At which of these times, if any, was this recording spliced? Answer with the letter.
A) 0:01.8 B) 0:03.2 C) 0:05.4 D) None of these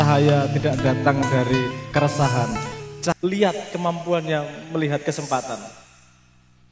B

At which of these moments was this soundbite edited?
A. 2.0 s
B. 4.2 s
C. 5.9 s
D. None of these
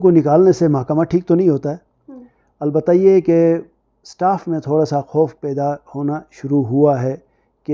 D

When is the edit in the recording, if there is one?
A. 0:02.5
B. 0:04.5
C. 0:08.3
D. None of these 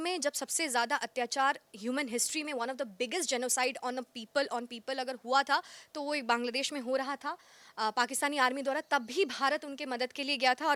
D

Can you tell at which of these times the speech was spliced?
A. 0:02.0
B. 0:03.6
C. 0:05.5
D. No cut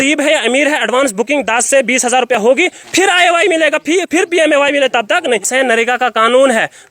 C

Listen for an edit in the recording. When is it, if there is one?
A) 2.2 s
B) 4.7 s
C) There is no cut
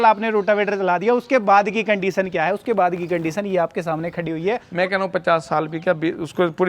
B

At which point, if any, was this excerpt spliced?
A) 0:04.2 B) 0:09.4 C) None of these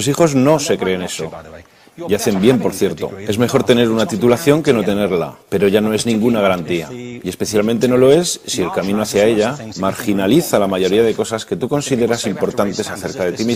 A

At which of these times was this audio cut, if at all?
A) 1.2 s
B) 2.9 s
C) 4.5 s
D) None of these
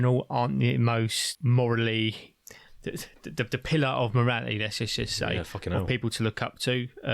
A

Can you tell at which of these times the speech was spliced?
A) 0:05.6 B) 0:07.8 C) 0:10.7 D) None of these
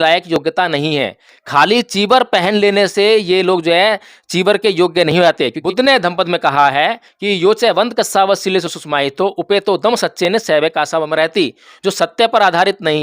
A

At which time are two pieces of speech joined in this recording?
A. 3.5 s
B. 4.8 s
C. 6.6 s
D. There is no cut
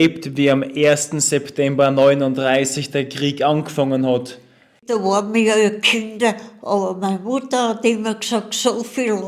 B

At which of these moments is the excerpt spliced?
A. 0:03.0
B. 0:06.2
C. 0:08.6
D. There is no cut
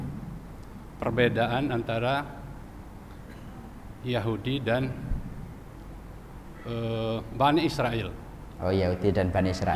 D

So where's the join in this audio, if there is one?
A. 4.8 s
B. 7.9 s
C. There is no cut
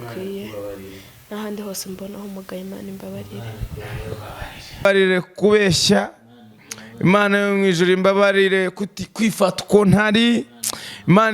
A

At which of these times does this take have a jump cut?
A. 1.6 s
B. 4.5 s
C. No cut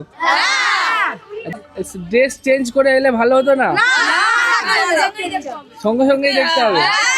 A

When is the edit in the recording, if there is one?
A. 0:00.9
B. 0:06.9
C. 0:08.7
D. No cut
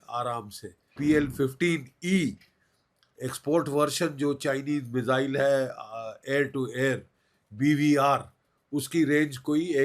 A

